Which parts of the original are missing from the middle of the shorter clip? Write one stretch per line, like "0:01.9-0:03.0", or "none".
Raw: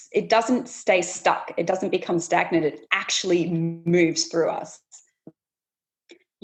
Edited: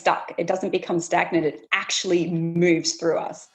0:03.7-0:03.8